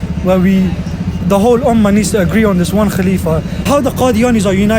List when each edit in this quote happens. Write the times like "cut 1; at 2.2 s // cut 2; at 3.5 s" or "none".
cut 1; at 3.6 s